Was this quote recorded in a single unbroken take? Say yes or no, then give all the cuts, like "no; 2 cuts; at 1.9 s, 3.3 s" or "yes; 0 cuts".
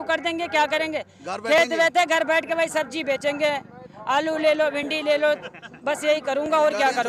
yes; 0 cuts